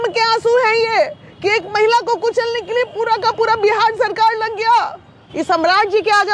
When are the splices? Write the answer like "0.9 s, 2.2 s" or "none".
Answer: 5.3 s